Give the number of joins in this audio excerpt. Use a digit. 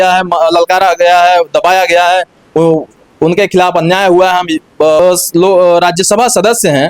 1